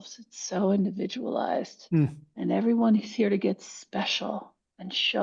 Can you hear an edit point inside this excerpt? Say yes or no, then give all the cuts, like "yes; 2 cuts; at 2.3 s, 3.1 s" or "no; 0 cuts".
yes; 1 cut; at 2.2 s